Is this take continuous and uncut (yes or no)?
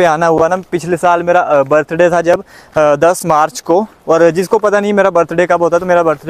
yes